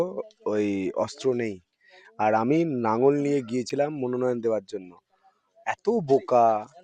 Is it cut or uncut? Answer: uncut